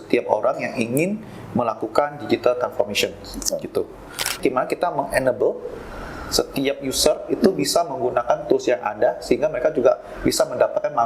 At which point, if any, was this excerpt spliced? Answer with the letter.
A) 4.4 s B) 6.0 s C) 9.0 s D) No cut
A